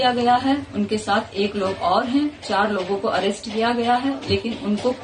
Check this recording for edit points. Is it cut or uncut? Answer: uncut